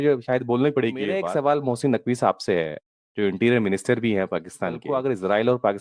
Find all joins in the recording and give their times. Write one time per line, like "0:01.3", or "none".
0:01.3
0:04.8